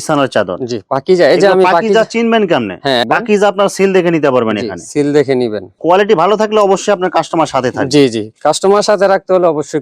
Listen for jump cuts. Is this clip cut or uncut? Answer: cut